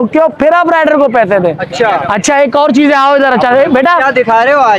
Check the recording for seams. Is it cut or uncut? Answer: uncut